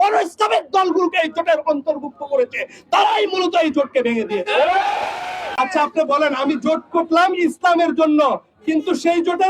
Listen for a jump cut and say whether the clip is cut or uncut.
cut